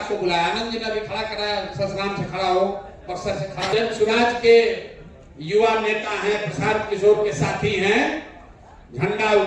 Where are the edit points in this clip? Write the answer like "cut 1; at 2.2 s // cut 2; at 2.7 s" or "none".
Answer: cut 1; at 3.7 s